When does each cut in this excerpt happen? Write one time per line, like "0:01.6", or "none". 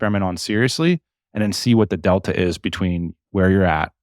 none